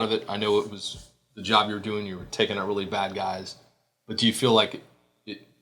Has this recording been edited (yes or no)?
no